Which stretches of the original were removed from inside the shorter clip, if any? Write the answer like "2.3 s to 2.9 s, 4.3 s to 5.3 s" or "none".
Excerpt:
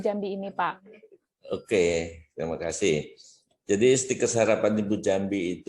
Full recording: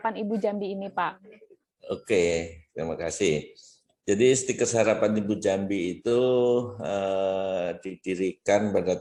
none